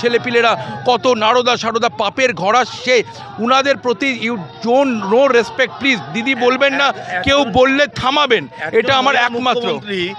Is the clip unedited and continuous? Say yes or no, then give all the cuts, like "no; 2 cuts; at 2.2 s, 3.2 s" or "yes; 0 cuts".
yes; 0 cuts